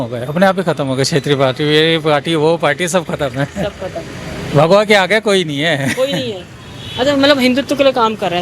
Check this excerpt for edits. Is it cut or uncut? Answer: uncut